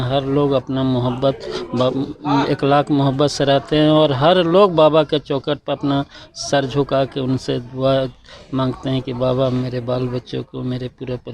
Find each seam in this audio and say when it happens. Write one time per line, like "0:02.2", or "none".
none